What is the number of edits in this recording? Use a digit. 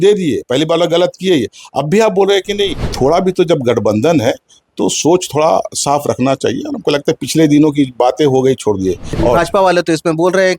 2